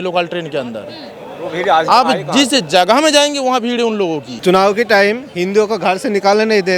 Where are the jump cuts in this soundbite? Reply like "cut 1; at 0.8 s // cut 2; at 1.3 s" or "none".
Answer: cut 1; at 4.3 s